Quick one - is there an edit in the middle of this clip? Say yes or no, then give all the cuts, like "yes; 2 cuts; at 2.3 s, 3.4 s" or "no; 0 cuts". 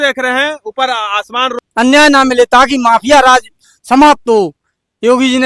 yes; 1 cut; at 1.6 s